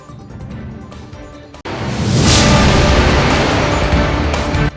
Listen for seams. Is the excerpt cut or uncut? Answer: cut